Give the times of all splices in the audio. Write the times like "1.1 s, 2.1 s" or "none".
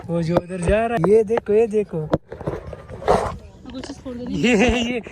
1.0 s